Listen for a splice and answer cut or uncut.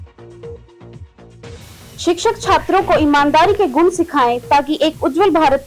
cut